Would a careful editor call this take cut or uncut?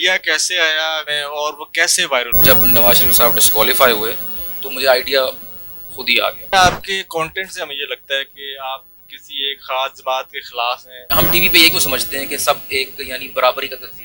cut